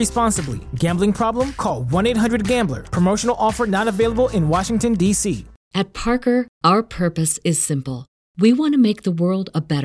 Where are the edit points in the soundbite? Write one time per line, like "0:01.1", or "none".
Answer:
0:05.6